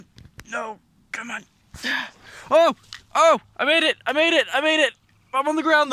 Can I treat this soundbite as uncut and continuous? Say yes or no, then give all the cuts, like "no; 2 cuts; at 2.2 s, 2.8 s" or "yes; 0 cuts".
yes; 0 cuts